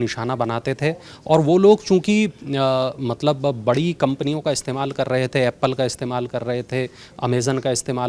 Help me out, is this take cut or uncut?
uncut